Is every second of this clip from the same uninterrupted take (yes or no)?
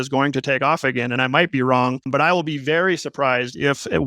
no